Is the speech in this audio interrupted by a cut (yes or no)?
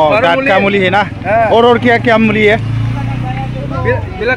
no